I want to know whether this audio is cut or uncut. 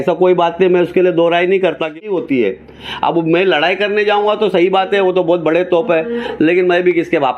cut